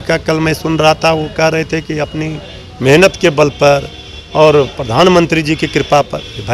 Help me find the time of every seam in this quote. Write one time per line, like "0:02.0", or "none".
none